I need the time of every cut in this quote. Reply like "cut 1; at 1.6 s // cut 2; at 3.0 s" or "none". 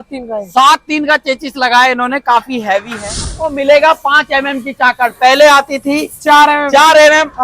cut 1; at 3.4 s